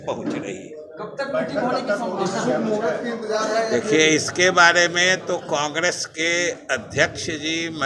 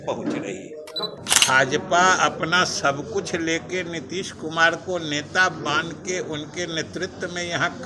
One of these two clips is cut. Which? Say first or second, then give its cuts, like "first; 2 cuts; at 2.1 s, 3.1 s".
second; 1 cut; at 1.1 s